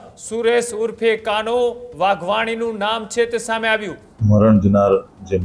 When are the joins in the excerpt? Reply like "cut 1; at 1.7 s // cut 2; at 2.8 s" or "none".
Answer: cut 1; at 4.0 s